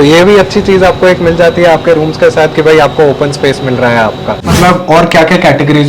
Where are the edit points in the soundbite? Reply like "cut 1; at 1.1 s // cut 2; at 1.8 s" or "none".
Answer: cut 1; at 4.5 s